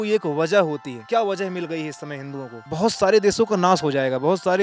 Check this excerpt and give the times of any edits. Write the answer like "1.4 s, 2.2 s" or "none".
0.9 s, 2.6 s